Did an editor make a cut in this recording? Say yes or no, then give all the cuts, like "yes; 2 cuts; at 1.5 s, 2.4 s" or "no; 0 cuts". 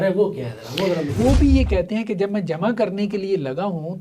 yes; 1 cut; at 1.1 s